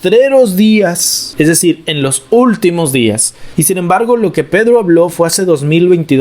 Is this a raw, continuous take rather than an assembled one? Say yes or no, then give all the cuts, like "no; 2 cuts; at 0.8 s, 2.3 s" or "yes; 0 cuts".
yes; 0 cuts